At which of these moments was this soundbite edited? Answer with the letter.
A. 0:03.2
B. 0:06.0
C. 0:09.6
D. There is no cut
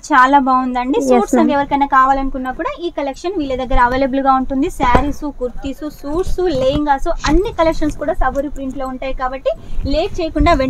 D